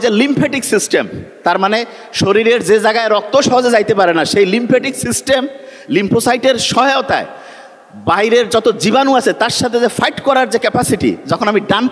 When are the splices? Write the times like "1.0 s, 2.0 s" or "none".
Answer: none